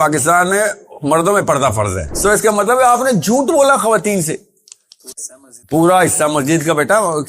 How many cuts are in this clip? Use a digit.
1